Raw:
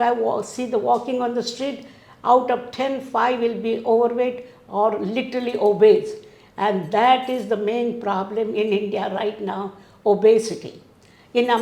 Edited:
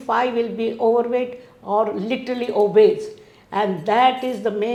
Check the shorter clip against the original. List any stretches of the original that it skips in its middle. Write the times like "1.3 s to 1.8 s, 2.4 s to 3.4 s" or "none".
none